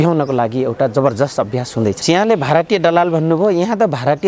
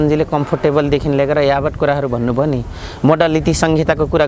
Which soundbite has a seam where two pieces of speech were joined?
first; 1 cut; at 2.0 s

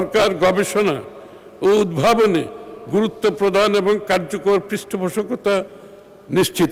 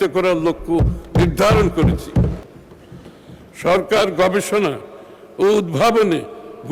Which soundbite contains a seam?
second; 1 cut; at 2.4 s

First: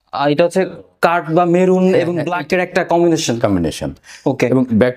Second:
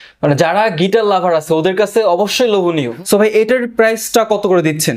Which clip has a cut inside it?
second; 1 cut; at 2.9 s

